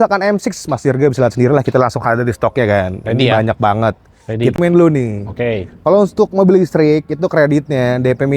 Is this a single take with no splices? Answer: no; 1 cut; at 4.5 s

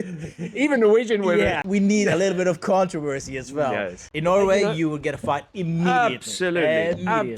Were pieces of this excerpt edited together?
yes; 2 cuts; at 1.6 s, 4.0 s

